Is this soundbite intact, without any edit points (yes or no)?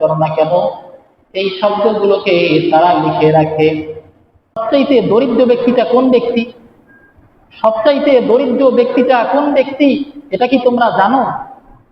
no